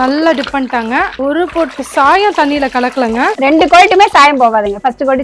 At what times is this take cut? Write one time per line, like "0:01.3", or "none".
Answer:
0:01.1
0:03.3